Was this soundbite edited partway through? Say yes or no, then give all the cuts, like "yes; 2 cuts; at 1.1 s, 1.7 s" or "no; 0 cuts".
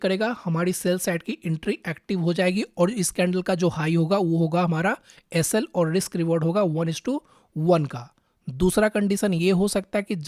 no; 0 cuts